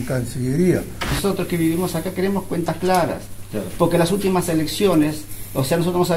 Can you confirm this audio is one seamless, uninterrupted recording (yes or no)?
no